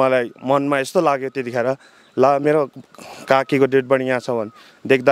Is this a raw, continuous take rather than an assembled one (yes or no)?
yes